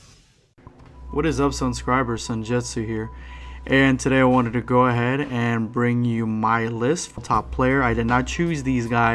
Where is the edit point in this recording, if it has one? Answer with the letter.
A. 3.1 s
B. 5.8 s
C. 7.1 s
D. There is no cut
D